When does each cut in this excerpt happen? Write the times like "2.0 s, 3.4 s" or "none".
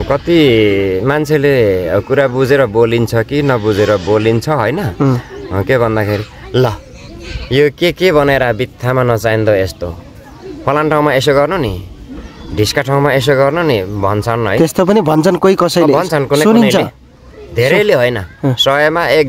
none